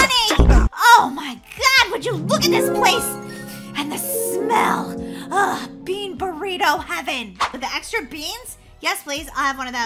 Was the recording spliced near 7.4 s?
yes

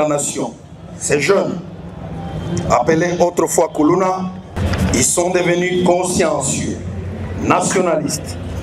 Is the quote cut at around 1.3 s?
no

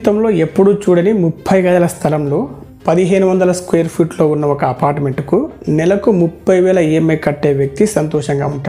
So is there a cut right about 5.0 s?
no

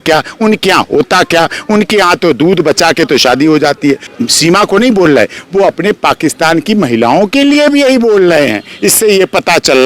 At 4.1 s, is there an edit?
yes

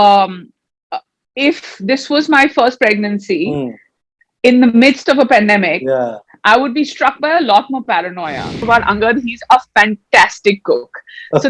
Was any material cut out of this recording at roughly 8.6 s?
yes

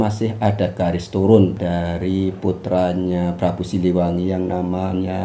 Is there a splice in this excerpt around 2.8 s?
no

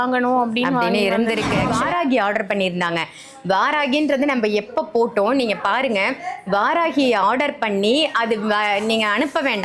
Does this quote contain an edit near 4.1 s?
no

